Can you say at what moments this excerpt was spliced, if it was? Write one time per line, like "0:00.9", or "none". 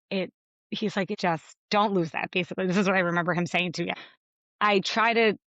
0:01.3
0:03.9